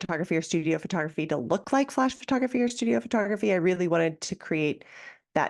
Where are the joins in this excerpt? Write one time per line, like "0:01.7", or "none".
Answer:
none